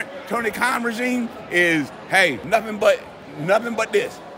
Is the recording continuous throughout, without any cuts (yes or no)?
no